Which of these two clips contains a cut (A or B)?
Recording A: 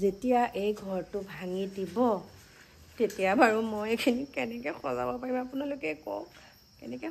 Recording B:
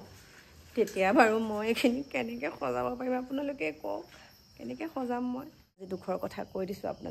B